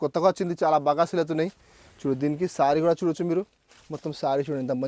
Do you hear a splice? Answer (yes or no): no